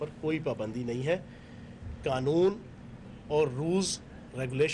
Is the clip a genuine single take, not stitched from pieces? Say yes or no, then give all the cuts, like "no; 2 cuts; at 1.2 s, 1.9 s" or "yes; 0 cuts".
no; 1 cut; at 1.6 s